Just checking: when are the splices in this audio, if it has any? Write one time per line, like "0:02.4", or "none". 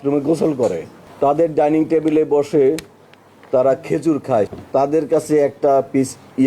0:01.0
0:04.5